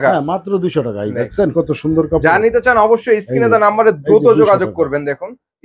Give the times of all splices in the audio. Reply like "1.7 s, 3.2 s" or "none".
none